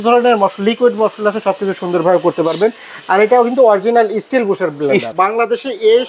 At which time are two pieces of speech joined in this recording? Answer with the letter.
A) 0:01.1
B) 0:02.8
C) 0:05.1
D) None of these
C